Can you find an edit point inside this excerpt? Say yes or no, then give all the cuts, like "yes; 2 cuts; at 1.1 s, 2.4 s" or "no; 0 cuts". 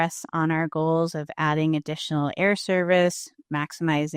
no; 0 cuts